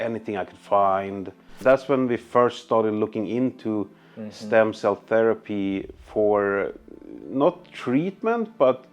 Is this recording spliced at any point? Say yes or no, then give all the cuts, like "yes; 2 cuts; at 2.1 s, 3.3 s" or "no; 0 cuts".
yes; 1 cut; at 1.5 s